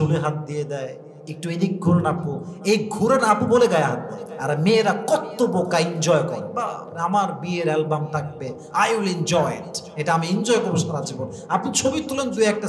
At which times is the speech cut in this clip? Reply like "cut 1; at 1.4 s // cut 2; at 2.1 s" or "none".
none